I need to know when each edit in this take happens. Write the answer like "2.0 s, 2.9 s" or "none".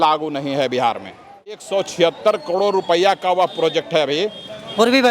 1.6 s